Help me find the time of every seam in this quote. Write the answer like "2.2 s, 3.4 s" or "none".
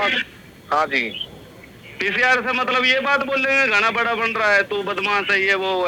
none